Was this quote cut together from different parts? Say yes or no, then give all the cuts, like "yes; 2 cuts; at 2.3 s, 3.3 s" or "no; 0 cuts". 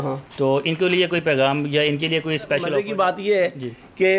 yes; 1 cut; at 2.7 s